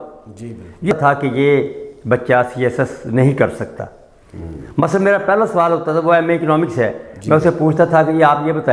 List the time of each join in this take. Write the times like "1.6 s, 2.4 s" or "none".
0.9 s